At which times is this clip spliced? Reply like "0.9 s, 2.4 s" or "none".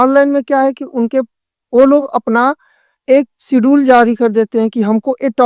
none